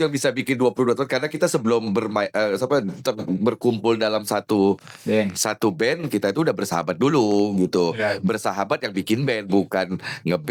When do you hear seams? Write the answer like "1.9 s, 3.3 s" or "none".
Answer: none